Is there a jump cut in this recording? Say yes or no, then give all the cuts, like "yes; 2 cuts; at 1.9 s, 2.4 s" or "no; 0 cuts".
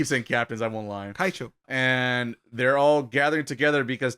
yes; 1 cut; at 1.7 s